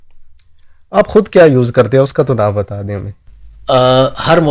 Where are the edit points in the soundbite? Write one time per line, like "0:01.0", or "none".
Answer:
none